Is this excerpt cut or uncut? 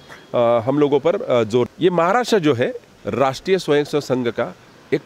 cut